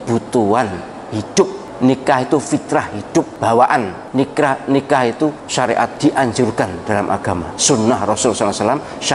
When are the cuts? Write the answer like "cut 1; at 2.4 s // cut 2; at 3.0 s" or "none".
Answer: cut 1; at 1.6 s // cut 2; at 3.3 s // cut 3; at 4.0 s // cut 4; at 5.9 s // cut 5; at 7.5 s

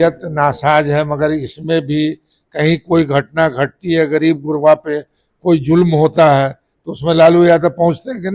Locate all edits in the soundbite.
none

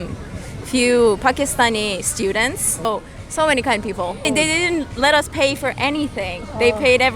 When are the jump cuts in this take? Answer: cut 1; at 2.9 s // cut 2; at 4.3 s

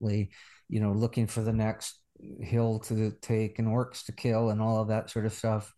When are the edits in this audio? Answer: none

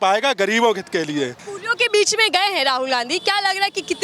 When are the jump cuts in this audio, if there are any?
cut 1; at 1.4 s

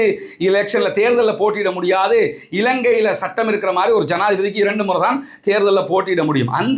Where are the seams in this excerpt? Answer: none

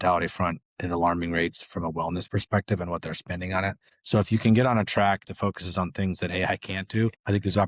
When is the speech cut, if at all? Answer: cut 1; at 3.9 s

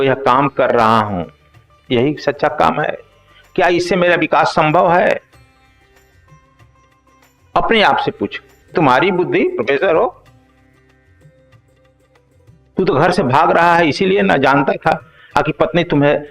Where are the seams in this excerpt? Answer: cut 1; at 5.3 s // cut 2; at 7.1 s // cut 3; at 8.7 s // cut 4; at 10.2 s // cut 5; at 12.7 s

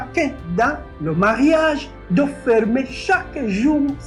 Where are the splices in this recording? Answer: none

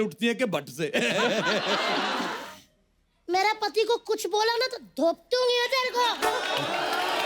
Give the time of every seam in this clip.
cut 1; at 2.3 s

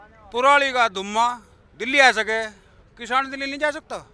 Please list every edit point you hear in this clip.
none

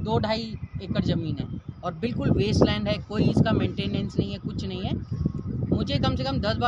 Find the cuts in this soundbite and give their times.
none

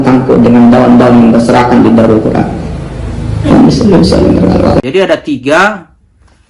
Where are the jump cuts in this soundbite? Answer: cut 1; at 4.8 s

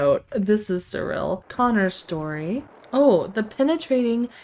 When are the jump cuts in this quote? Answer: cut 1; at 1.4 s // cut 2; at 2.8 s

